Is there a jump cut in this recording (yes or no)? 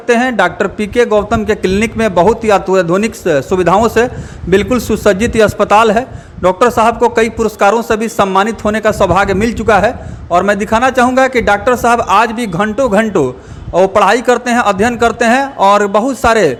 no